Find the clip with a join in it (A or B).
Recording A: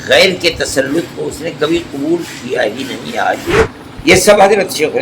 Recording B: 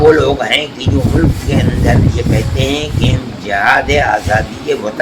A